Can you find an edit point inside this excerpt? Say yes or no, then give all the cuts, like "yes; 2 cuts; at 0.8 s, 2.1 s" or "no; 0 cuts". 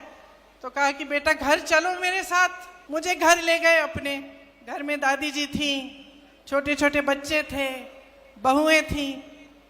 yes; 1 cut; at 2.7 s